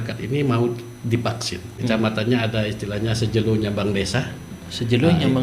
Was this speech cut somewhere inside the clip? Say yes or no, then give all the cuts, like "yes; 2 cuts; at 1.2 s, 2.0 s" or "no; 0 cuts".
yes; 1 cut; at 1.7 s